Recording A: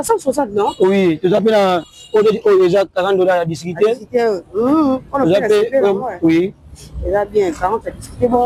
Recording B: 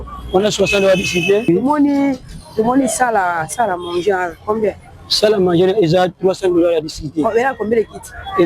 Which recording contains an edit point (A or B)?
B